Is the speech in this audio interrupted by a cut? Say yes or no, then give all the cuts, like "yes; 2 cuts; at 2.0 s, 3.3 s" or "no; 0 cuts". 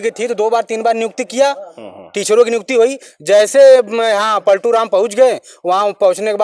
no; 0 cuts